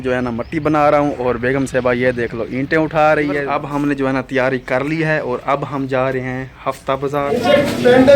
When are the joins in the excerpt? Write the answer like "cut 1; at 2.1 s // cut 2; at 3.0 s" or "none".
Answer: cut 1; at 3.4 s // cut 2; at 7.4 s